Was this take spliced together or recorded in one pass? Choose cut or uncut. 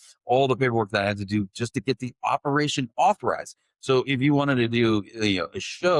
uncut